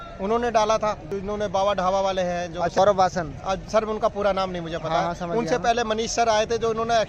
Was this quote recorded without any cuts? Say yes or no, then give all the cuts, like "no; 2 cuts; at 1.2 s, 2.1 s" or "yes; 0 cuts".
no; 2 cuts; at 1.1 s, 2.7 s